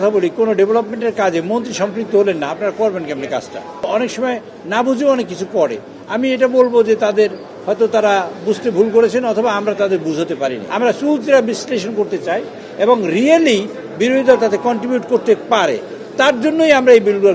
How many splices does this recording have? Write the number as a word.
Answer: two